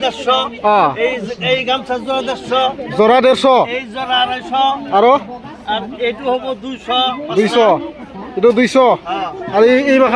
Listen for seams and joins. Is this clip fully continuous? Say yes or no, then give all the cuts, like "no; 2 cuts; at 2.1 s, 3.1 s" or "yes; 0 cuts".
yes; 0 cuts